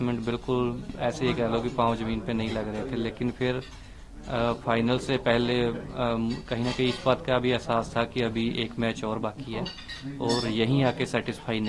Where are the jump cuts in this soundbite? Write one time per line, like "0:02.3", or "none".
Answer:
none